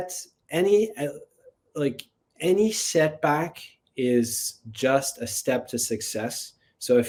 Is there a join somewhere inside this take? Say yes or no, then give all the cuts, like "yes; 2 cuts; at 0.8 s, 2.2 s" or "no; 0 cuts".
no; 0 cuts